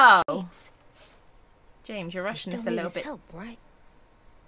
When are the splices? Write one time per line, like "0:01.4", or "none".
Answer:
none